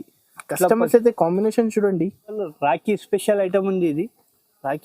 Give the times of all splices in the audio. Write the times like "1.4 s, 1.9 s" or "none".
2.4 s